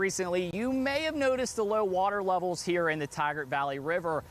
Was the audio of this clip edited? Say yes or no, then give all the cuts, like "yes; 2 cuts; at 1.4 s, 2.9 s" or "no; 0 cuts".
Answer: no; 0 cuts